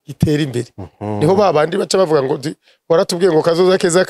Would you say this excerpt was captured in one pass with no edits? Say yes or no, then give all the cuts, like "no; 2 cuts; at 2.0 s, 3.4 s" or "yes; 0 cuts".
yes; 0 cuts